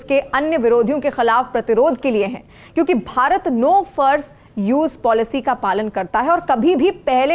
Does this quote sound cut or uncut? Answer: uncut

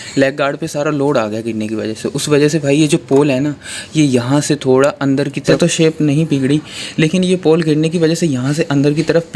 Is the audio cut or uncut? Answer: cut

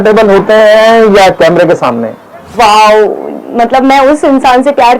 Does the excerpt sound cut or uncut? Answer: cut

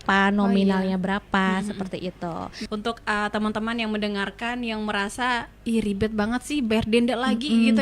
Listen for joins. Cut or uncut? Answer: cut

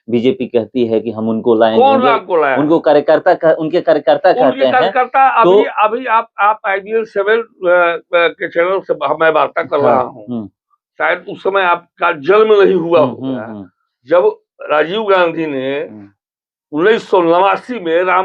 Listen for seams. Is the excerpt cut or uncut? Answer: uncut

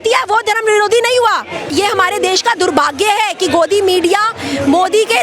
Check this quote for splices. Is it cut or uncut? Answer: cut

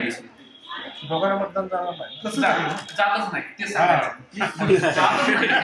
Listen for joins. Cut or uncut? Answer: uncut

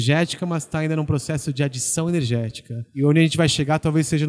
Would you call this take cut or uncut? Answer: cut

